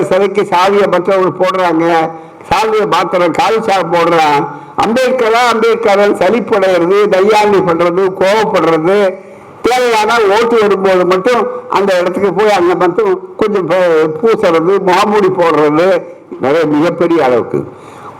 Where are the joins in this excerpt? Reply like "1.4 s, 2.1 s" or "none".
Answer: 16.2 s